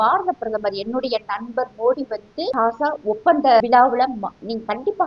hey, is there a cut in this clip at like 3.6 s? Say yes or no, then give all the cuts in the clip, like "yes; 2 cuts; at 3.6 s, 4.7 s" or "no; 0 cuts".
yes; 2 cuts; at 2.5 s, 3.6 s